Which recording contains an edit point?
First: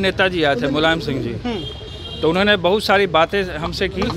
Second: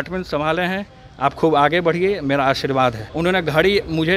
second; 1 cut; at 3.1 s

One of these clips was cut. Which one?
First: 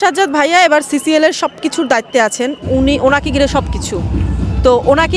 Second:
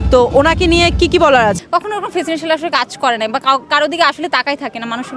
second; 1 cut; at 1.6 s

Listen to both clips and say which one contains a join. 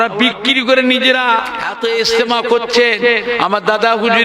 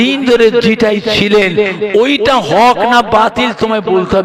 first; 1 cut; at 1.6 s

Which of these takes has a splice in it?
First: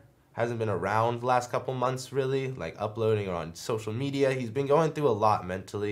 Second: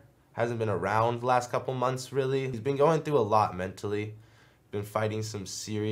second; 1 cut; at 2.6 s

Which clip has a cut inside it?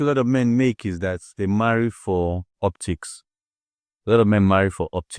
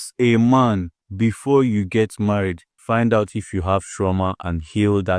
second; 2 cuts; at 1.0 s, 2.7 s

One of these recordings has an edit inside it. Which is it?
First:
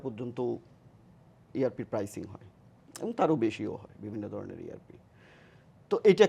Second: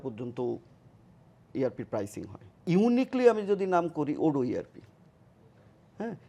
second; 1 cut; at 2.6 s

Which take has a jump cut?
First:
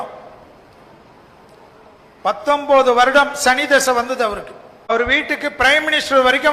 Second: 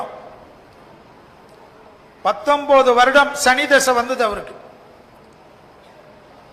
first; 1 cut; at 4.9 s

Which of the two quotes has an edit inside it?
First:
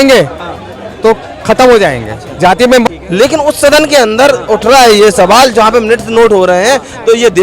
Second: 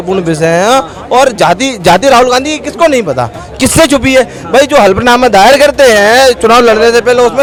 first; 1 cut; at 2.9 s

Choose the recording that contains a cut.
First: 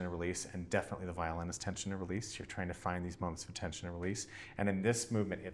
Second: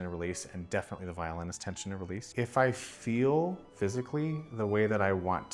second; 2 cuts; at 2.2 s, 3.6 s

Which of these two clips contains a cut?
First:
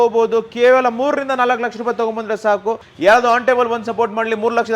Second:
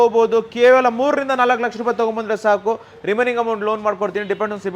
first; 1 cut; at 2.9 s

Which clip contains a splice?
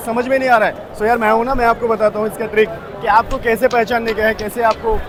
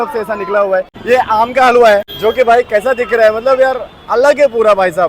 second; 2 cuts; at 0.9 s, 2.1 s

